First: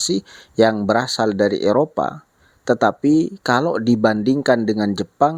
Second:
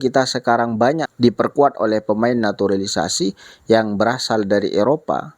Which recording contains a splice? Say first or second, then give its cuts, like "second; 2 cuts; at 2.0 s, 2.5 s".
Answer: second; 1 cut; at 1.1 s